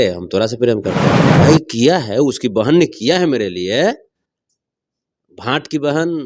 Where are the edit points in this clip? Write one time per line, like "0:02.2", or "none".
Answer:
0:01.3